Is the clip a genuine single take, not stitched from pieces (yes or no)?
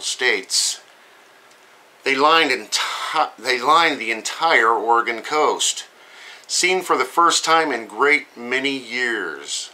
no